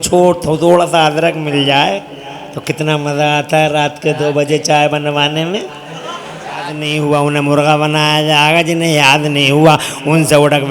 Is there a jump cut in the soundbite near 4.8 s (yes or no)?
no